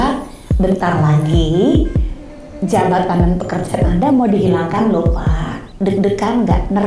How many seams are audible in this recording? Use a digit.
1